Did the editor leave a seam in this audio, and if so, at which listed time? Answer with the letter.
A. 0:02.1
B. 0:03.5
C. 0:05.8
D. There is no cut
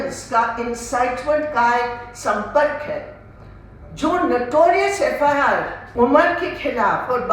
C